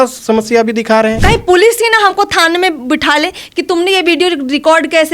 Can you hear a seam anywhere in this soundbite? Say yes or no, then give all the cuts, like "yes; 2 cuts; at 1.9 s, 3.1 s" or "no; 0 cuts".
yes; 1 cut; at 1.2 s